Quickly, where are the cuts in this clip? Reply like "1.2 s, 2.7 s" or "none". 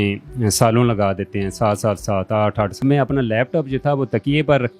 2.8 s